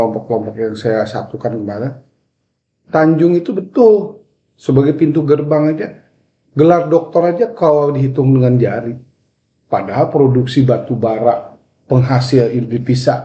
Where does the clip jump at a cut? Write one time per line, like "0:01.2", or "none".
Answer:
none